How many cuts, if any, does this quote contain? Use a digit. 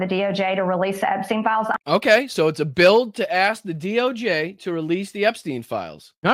0